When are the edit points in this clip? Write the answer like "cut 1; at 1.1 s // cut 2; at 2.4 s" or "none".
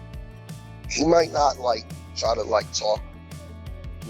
cut 1; at 0.9 s